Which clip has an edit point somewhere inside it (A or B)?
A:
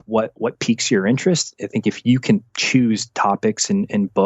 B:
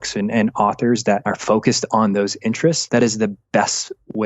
B